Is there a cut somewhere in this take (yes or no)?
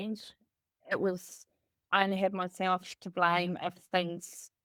no